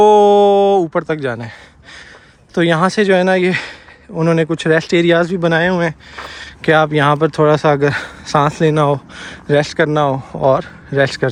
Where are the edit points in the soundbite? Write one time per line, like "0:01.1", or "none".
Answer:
none